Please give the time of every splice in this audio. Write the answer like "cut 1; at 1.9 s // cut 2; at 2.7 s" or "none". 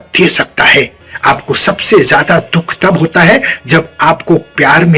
cut 1; at 1.0 s